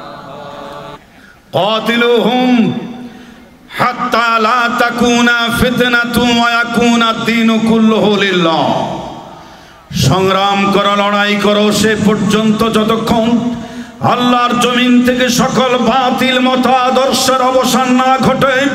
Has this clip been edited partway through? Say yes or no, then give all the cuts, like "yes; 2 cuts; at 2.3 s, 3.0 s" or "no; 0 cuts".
yes; 1 cut; at 0.9 s